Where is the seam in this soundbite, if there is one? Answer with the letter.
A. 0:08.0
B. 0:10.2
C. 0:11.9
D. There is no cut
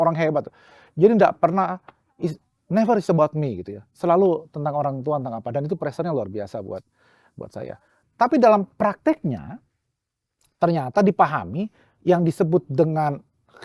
A